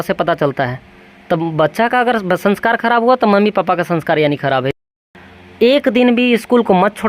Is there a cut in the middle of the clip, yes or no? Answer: yes